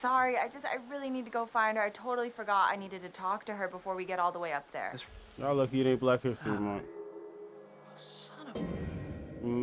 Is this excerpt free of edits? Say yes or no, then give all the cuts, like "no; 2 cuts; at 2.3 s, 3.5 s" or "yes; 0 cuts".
no; 1 cut; at 5.0 s